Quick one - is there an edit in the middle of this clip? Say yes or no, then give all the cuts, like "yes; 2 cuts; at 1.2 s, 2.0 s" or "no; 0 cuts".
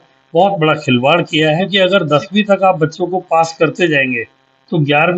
yes; 1 cut; at 1.7 s